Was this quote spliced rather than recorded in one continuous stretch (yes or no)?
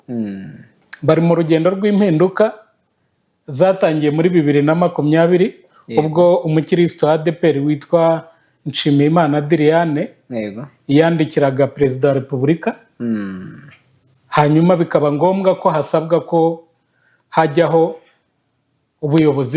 no